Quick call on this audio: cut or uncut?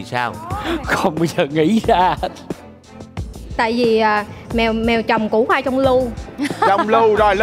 uncut